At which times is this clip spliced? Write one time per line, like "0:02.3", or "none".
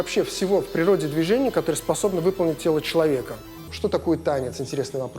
0:03.7